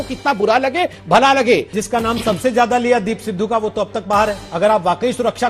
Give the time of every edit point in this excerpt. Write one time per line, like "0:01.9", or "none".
0:01.8
0:04.4